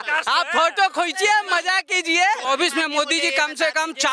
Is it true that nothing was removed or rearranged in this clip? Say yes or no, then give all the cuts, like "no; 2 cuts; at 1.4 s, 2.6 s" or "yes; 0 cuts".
no; 1 cut; at 2.4 s